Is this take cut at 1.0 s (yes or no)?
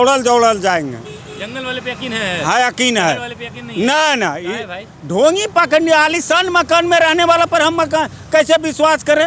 no